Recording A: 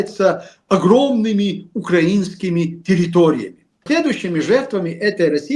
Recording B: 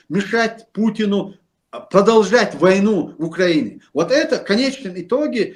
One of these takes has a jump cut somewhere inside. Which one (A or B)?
A